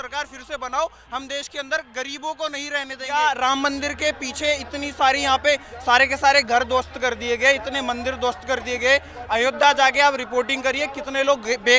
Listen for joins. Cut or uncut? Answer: cut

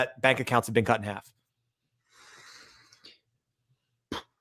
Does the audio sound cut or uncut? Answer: uncut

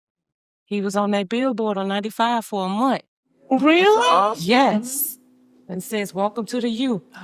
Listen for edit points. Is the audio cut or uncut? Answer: uncut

